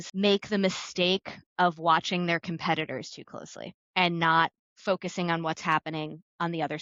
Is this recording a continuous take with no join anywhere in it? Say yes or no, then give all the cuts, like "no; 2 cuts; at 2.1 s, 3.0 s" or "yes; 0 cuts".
yes; 0 cuts